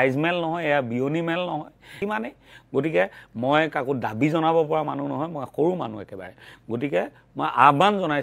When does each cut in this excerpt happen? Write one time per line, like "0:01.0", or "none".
0:02.0